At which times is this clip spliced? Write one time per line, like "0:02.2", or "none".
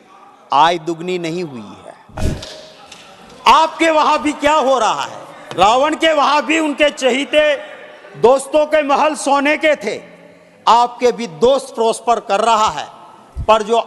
0:02.2

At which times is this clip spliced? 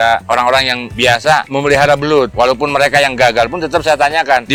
none

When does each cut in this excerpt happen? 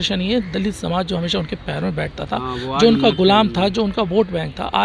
none

